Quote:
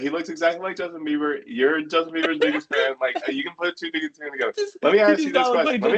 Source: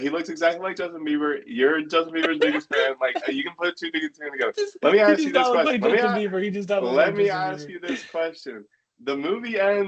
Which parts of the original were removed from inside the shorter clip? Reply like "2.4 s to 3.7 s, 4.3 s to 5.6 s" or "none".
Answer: none